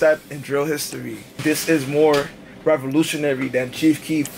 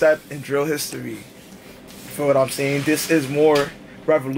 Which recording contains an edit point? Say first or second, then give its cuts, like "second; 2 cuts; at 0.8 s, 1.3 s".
first; 1 cut; at 1.4 s